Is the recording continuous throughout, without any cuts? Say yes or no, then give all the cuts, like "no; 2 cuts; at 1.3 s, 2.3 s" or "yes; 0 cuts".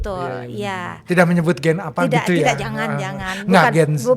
yes; 0 cuts